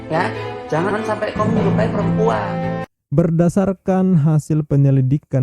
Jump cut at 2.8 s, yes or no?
yes